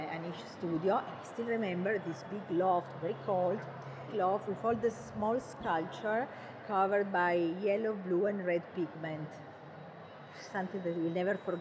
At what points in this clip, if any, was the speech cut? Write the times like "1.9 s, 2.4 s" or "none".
4.0 s

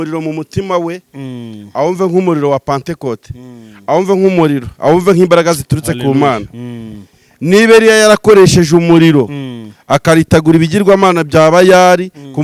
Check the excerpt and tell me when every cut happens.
none

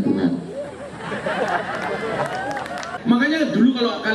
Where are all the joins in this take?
2.9 s

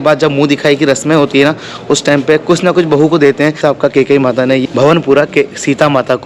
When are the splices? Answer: none

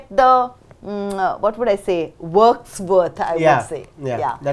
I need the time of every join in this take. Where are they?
none

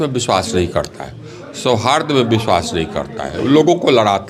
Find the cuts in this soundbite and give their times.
none

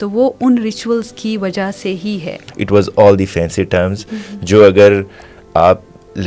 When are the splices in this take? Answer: 2.4 s

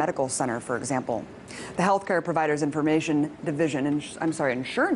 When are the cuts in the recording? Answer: none

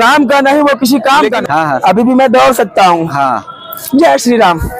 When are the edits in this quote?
1.4 s

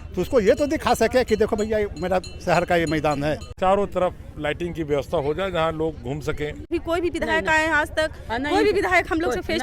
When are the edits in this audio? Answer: 3.5 s, 6.7 s

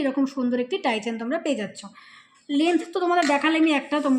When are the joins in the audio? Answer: none

